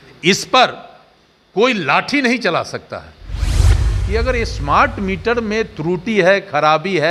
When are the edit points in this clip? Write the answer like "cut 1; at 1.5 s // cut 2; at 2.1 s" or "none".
cut 1; at 3.6 s